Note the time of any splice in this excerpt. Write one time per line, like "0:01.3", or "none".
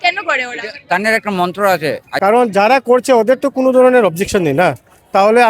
0:02.1

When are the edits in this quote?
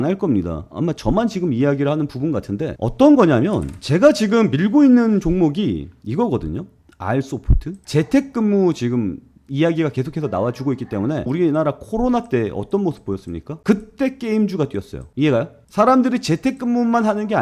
0:07.7
0:11.3
0:13.5

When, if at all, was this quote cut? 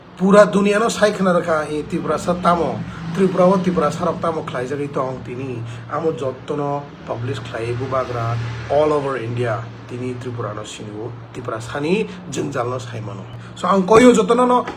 0:13.4

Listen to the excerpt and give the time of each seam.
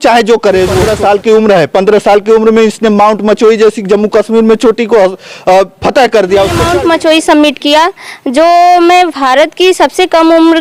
0:00.9
0:06.6

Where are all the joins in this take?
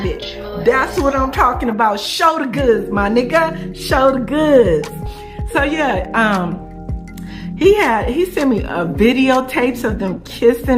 none

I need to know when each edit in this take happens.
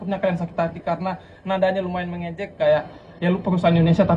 none

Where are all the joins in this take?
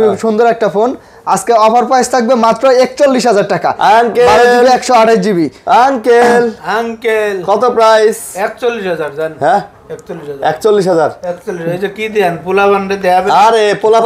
none

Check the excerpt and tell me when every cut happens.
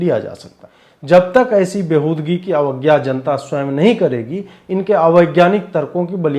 0:01.1

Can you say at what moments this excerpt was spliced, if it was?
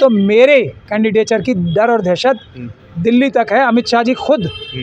none

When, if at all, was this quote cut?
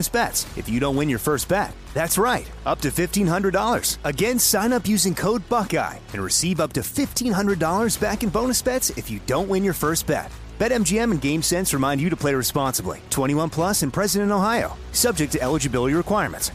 none

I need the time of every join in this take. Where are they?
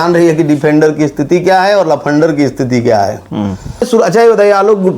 0:03.9

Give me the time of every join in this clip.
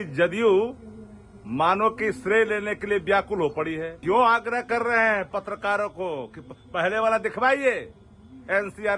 0:03.9

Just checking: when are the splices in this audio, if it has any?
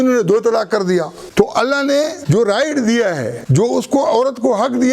0:01.2
0:02.2
0:03.4

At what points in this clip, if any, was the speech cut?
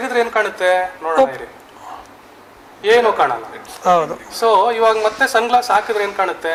none

